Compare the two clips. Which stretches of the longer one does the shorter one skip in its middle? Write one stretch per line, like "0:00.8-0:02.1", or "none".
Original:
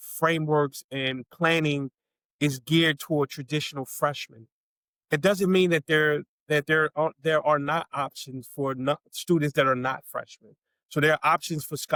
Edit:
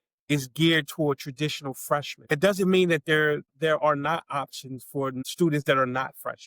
0:04.3-0:05.0
0:06.3-0:07.2
0:08.8-0:09.1